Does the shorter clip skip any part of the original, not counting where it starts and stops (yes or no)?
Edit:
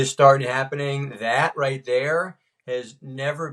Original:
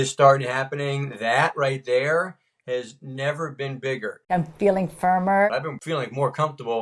no